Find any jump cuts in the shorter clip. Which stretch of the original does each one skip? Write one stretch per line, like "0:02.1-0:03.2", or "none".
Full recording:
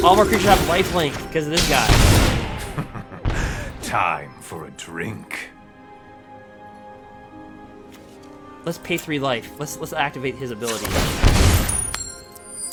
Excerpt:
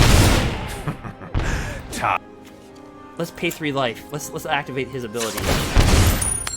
0:04.1-0:07.6